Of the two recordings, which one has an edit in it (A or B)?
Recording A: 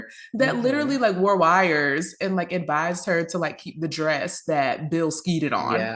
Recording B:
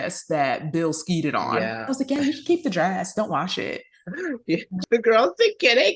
B